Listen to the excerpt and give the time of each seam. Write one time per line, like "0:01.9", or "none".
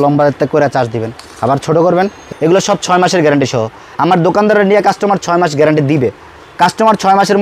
0:02.3